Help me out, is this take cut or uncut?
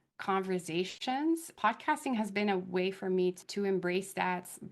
cut